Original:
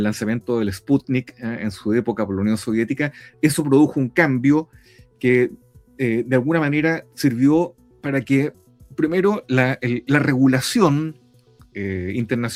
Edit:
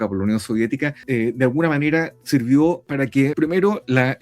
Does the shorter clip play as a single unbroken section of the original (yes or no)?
no